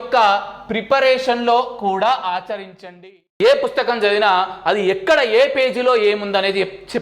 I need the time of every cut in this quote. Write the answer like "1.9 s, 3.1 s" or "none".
3.0 s

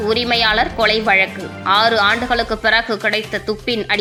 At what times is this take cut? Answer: none

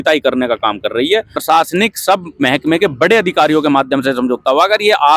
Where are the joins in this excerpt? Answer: 1.4 s

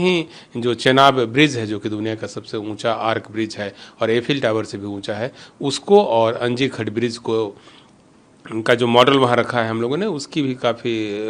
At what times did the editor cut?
none

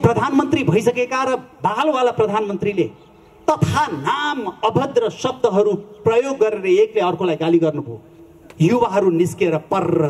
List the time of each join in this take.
none

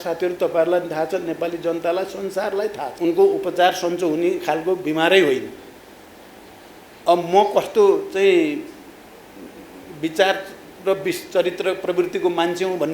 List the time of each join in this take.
2.9 s

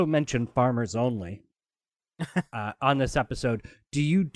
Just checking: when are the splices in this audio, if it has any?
none

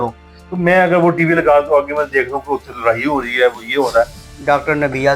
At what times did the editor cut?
4.2 s

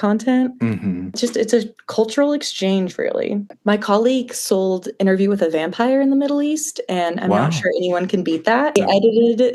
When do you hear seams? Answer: 1.2 s, 3.6 s, 8.8 s

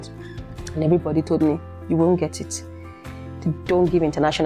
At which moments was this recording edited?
none

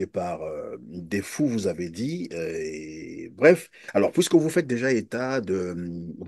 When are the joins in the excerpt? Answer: 3.8 s

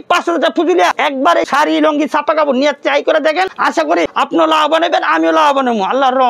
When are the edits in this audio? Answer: 1.5 s, 3.9 s

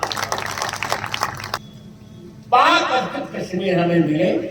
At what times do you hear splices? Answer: 1.6 s

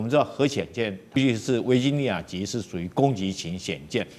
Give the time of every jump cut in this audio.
1.2 s

